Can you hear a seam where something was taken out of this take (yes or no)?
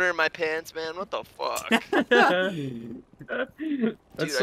no